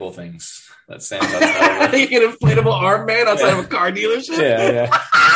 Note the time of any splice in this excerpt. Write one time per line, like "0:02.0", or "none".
none

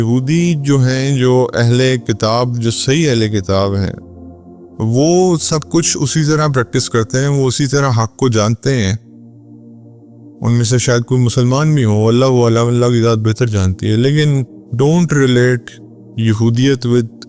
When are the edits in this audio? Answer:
0:09.0
0:10.4

